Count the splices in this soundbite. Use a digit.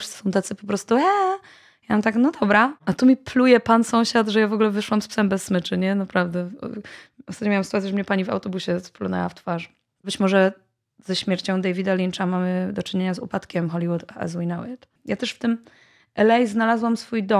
3